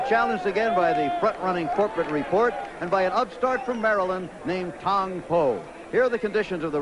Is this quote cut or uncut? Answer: cut